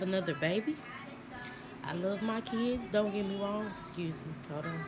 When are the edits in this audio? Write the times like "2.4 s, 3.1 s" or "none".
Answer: none